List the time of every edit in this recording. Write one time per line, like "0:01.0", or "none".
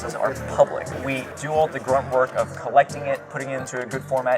0:00.9

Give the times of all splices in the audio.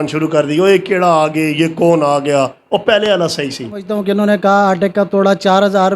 0:03.9

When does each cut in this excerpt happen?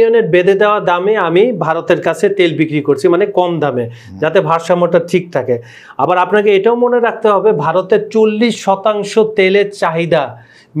none

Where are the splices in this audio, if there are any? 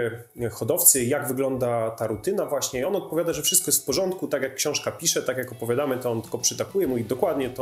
none

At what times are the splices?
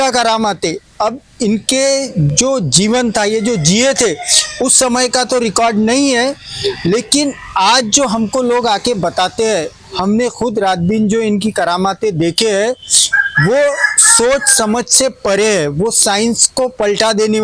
none

